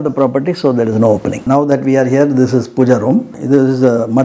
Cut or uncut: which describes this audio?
cut